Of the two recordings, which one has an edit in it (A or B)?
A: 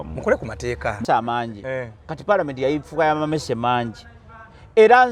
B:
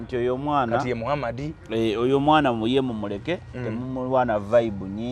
A